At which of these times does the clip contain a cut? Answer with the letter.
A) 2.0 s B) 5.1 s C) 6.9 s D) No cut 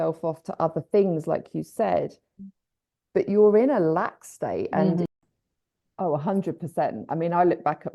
B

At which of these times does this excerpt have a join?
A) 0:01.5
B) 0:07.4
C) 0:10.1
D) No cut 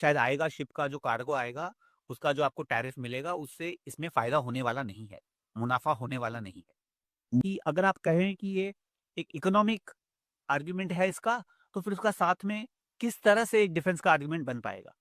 B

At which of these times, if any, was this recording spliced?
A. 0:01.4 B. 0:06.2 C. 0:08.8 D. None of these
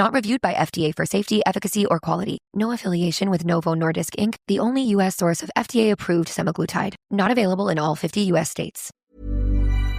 C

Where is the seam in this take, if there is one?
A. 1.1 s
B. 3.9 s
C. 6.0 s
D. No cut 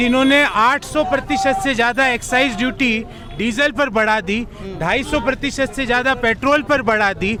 D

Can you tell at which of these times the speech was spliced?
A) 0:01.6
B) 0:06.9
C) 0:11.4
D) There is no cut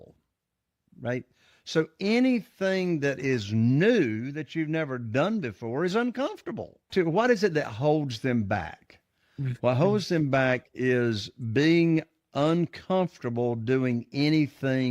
B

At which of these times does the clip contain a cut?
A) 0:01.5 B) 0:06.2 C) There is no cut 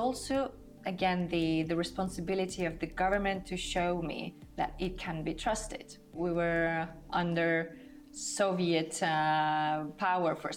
B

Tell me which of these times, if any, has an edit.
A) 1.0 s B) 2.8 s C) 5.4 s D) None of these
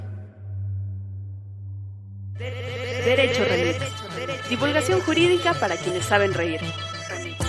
B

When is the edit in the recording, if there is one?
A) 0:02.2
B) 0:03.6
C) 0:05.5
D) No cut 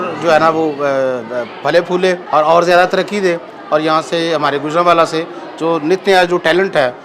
A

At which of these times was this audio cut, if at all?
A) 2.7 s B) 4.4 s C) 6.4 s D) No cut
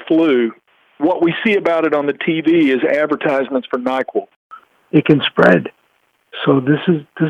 B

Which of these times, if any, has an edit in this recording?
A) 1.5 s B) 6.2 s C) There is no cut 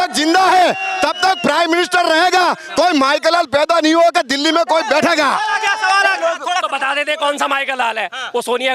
B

